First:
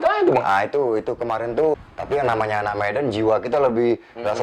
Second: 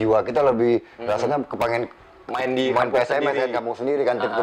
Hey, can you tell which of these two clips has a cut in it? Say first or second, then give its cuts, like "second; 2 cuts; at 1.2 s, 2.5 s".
first; 1 cut; at 1.8 s